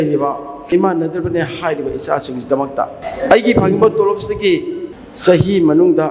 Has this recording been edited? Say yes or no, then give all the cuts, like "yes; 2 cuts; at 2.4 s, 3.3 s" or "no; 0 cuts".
yes; 2 cuts; at 0.7 s, 3.0 s